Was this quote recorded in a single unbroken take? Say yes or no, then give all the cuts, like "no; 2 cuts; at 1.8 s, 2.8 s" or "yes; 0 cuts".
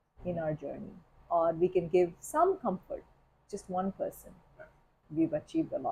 no; 1 cut; at 5.0 s